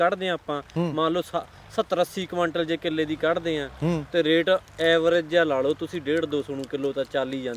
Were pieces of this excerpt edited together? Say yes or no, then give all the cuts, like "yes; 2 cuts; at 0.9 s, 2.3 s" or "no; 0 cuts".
no; 0 cuts